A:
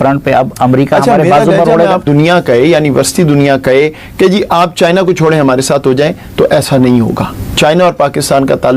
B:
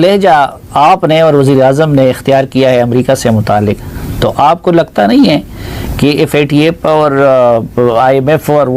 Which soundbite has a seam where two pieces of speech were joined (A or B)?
A